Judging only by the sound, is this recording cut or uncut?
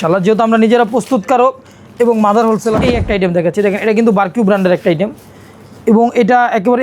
cut